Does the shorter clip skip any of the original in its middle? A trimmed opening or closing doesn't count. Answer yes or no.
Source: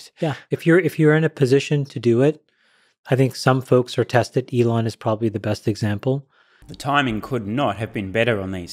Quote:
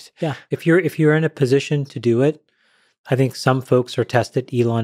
no